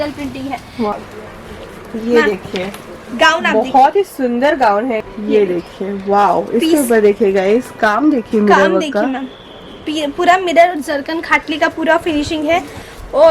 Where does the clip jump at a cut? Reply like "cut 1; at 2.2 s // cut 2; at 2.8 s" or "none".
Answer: cut 1; at 0.9 s // cut 2; at 5.0 s